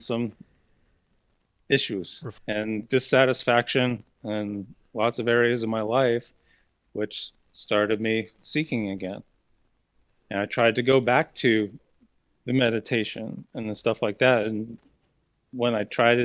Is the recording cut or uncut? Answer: cut